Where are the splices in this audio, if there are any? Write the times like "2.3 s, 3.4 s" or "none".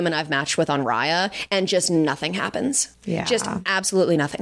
2.9 s